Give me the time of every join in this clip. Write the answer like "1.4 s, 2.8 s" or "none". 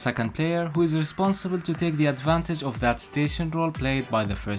none